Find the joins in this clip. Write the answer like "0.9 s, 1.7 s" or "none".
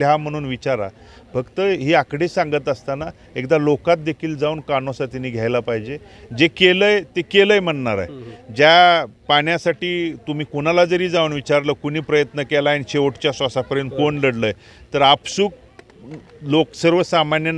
none